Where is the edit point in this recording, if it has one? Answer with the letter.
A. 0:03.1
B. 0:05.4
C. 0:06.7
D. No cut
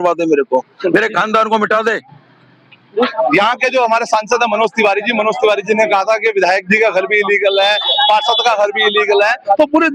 A